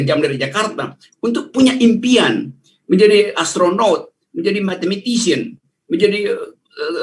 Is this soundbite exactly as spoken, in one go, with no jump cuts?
yes; 0 cuts

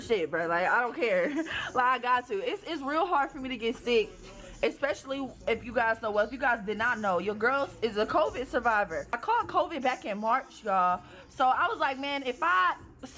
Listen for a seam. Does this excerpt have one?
yes; 2 cuts; at 2.3 s, 5.0 s

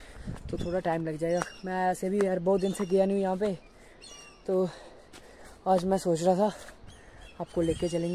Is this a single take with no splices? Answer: yes; 0 cuts

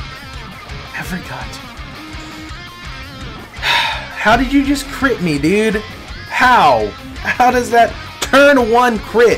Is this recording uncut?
yes; 0 cuts

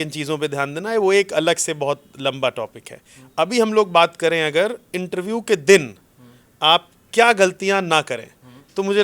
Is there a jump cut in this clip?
no; 0 cuts

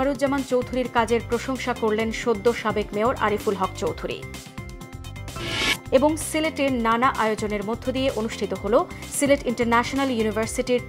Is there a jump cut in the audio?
no; 0 cuts

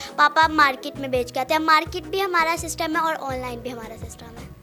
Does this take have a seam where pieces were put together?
no; 0 cuts

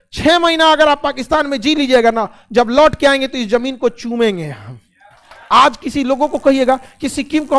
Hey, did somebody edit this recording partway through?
yes; 1 cut; at 5.3 s

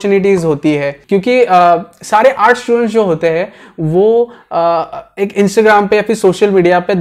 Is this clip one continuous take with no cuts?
no; 1 cut; at 0.9 s

